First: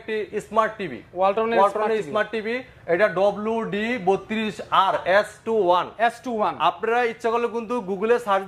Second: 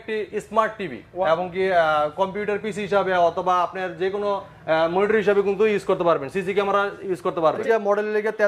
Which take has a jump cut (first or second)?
second